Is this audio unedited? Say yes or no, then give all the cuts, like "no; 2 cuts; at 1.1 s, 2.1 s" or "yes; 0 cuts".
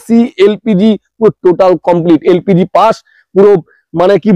yes; 0 cuts